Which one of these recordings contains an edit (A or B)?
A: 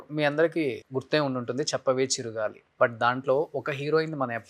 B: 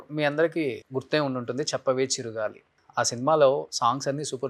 A